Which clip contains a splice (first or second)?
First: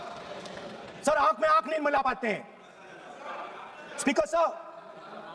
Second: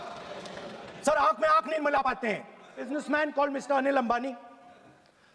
second